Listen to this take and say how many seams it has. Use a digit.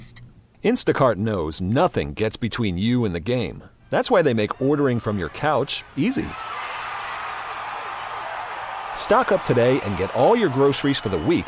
0